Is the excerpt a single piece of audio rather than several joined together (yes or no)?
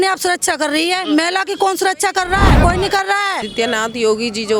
no